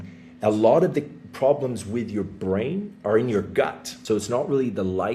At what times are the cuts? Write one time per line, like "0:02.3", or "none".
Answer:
0:03.9